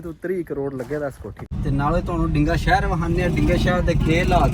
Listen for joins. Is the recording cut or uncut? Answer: cut